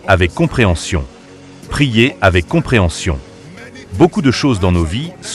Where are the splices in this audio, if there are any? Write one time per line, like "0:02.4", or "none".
none